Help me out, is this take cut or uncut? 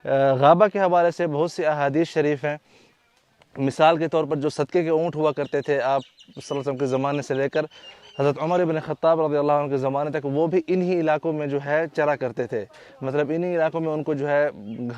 uncut